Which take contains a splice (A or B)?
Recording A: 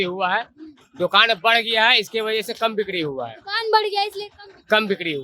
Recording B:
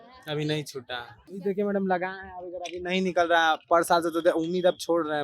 B